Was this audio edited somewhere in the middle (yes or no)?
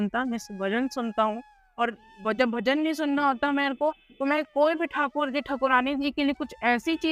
no